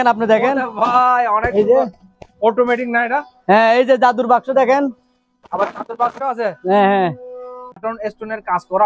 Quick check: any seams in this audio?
yes; 1 cut; at 7.8 s

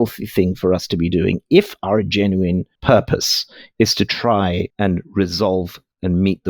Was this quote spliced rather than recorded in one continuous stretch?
yes; 1 cut; at 4.7 s

